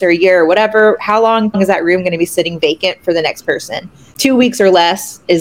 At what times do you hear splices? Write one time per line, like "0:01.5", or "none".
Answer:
0:01.5
0:04.1